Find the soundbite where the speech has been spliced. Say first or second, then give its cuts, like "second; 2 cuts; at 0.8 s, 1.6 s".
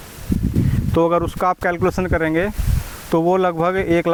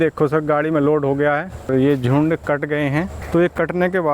second; 2 cuts; at 1.7 s, 3.2 s